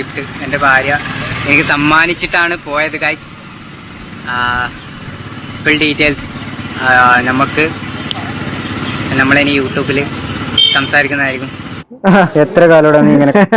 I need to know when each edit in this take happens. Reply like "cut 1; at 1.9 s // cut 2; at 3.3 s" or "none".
none